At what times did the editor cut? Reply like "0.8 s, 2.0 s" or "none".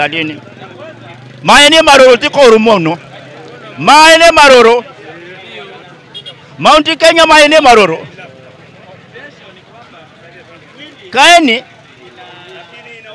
none